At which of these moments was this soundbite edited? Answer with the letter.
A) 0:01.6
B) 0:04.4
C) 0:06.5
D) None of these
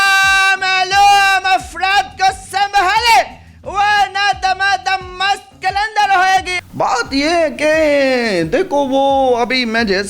C